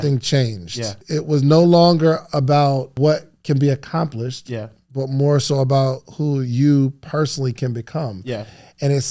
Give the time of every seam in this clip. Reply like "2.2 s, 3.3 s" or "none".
1.0 s, 2.9 s